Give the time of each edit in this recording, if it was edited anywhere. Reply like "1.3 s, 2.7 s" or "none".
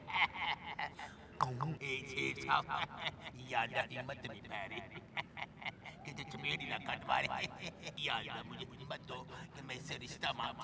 1.8 s, 7.9 s